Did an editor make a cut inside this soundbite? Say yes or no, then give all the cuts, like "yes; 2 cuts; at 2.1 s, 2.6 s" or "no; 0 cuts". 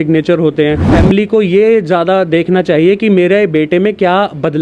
yes; 1 cut; at 0.9 s